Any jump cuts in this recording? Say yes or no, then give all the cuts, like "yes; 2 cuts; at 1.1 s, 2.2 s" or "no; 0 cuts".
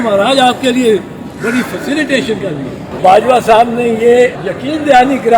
yes; 2 cuts; at 3.0 s, 4.5 s